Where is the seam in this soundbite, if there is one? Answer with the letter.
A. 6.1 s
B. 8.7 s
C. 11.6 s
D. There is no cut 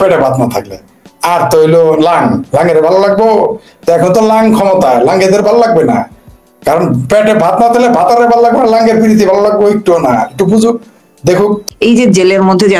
C